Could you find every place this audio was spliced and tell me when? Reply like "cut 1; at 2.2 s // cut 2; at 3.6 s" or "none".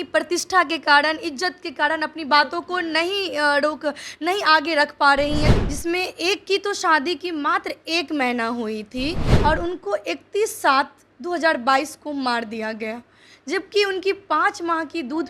cut 1; at 5.6 s // cut 2; at 9.3 s